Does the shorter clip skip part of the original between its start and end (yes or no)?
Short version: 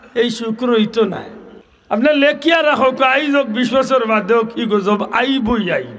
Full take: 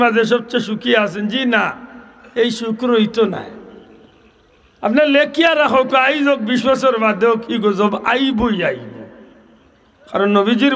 yes